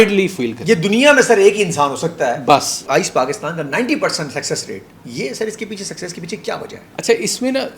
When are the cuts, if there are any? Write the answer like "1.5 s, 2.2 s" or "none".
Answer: 2.8 s, 6.8 s